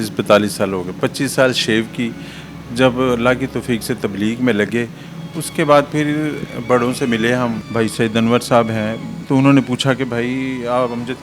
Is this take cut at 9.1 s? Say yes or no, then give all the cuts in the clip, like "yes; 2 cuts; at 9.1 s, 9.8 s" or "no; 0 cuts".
yes; 2 cuts; at 7.6 s, 9.1 s